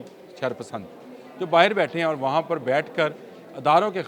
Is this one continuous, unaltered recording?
yes; 0 cuts

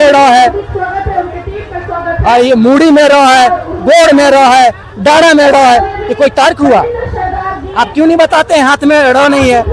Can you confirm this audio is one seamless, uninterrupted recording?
yes; 0 cuts

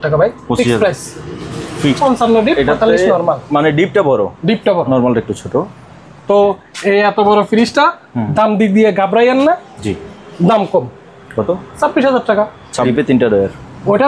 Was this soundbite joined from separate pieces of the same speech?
yes; 2 cuts; at 2.0 s, 12.9 s

